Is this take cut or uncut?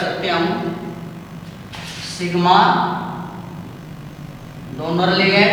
uncut